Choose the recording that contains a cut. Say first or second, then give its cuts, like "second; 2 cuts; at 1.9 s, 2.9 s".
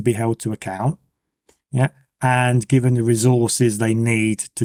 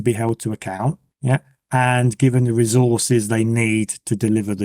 second; 1 cut; at 1.1 s